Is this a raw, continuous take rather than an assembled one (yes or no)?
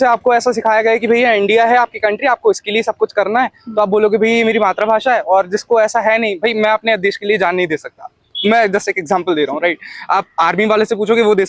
yes